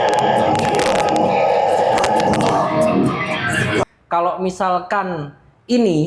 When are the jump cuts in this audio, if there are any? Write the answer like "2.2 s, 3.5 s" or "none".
3.8 s